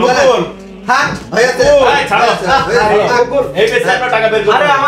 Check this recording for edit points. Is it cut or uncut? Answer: uncut